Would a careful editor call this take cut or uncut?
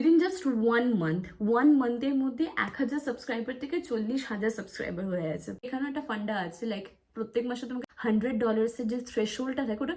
cut